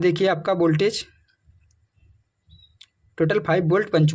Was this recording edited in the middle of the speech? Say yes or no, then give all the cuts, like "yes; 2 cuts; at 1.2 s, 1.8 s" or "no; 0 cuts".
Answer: no; 0 cuts